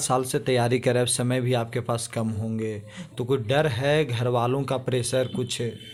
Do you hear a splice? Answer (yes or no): no